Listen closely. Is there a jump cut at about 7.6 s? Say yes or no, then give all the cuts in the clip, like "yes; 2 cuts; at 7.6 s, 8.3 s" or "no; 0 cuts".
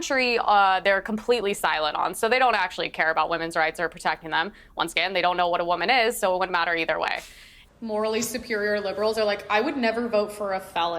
yes; 1 cut; at 7.6 s